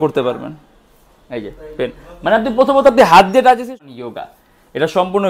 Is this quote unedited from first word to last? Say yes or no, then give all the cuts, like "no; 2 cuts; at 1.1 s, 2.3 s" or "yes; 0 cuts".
no; 1 cut; at 3.7 s